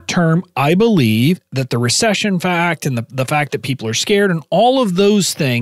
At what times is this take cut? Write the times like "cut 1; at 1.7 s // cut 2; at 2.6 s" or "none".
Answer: cut 1; at 1.5 s